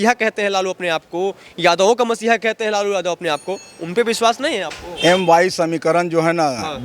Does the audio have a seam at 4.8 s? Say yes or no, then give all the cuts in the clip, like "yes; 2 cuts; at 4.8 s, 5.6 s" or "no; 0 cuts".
yes; 1 cut; at 4.8 s